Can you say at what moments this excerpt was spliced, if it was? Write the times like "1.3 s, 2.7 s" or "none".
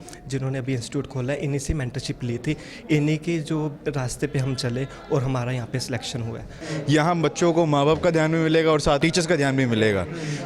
6.6 s, 9.0 s